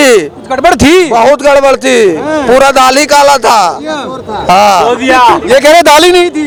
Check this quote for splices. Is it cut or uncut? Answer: uncut